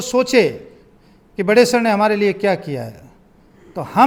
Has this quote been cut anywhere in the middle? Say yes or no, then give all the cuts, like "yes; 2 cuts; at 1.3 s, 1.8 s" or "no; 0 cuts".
no; 0 cuts